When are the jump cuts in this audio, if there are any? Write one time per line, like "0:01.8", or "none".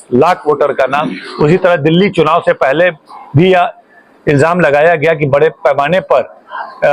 none